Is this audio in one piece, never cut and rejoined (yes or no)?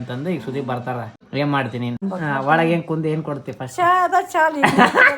no